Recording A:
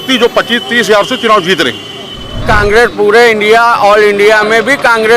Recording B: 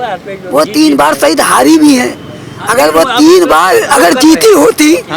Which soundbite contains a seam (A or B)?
A